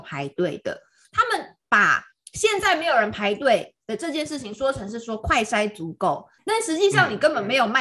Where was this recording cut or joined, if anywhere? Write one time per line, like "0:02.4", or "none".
0:01.0